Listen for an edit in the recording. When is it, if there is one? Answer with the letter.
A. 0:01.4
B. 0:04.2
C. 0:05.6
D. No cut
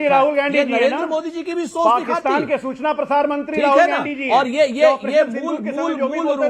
A